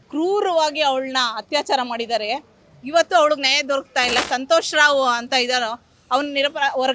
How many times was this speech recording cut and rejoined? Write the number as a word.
one